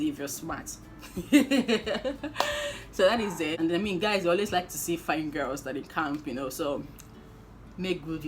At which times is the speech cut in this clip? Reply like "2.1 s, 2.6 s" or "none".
3.5 s